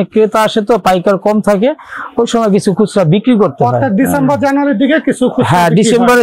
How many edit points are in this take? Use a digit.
0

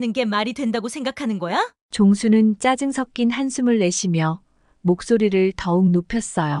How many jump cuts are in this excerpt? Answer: 0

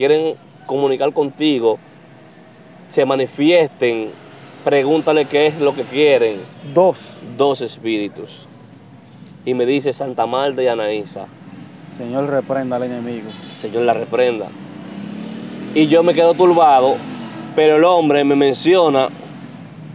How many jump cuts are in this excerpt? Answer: 0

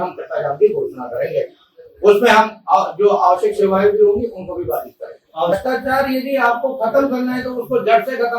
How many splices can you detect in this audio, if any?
1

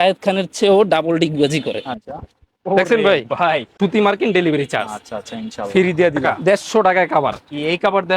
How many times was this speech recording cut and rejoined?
3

